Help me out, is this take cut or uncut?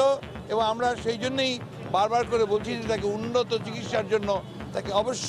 uncut